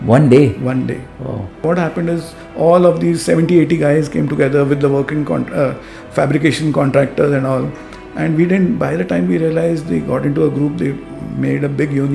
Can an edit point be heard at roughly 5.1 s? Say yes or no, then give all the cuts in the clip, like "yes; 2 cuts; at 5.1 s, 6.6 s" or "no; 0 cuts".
no; 1 cut; at 1.6 s